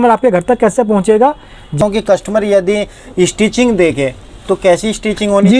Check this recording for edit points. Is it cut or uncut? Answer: cut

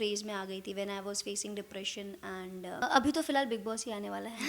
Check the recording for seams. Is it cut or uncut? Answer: cut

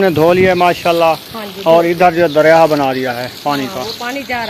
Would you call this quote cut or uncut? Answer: uncut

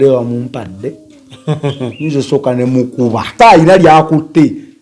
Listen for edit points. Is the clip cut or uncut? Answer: cut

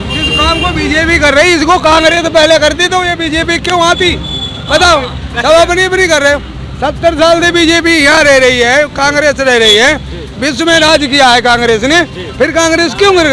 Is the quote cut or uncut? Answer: uncut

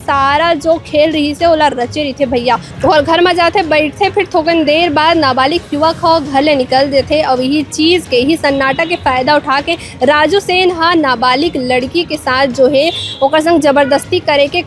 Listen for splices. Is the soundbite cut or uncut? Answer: cut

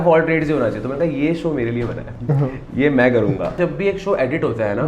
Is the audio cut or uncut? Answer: cut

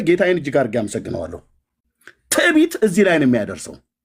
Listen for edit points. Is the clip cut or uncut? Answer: uncut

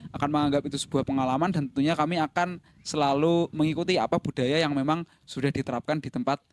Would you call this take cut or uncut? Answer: uncut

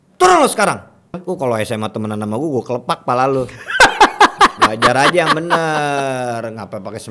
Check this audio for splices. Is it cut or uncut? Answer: cut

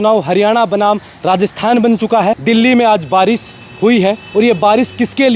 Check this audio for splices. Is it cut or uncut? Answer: cut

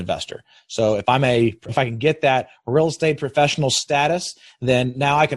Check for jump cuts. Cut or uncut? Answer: cut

